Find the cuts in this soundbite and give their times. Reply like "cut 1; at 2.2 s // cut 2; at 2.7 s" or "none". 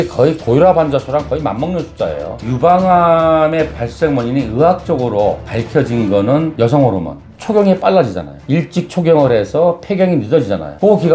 cut 1; at 2.4 s // cut 2; at 7.3 s